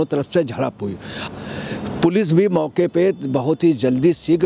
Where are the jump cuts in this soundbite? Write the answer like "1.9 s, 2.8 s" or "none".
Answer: 1.2 s

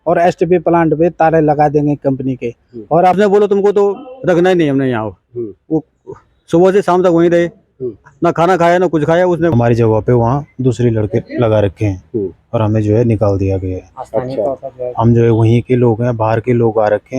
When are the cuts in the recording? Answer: 3.2 s, 9.5 s

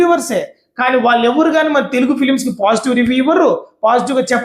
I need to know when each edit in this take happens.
none

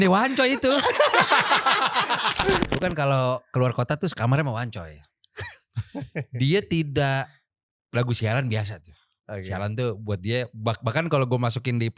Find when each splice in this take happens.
2.6 s

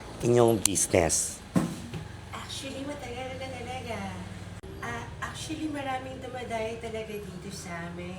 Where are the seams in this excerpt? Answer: 4.6 s

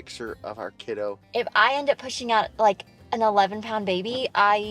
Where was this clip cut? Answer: 1.2 s

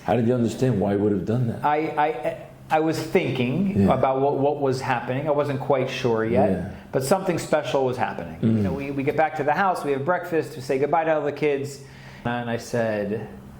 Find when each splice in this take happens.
8.8 s, 12.2 s

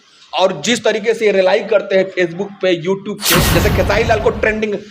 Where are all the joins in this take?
3.5 s

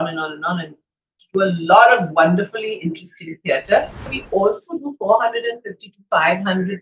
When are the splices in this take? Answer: 4.2 s

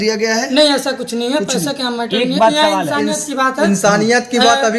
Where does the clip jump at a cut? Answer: none

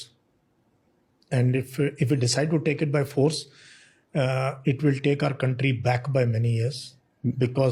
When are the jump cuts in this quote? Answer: none

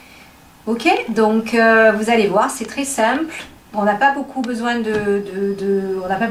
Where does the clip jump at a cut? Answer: none

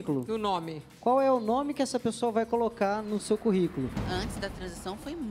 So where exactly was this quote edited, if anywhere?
4.0 s

